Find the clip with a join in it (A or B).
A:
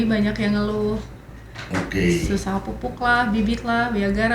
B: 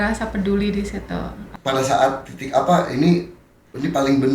B